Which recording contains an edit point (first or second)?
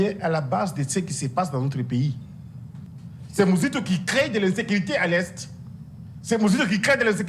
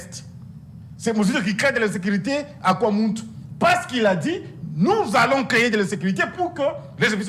first